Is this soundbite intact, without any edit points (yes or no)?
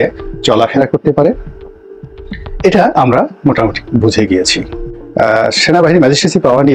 no